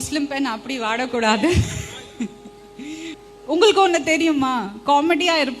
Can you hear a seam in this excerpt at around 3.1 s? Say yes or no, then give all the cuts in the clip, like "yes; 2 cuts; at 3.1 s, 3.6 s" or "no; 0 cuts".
yes; 1 cut; at 3.1 s